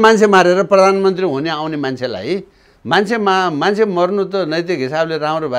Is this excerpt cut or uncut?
uncut